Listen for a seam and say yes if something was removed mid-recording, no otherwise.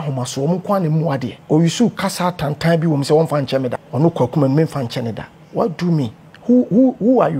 yes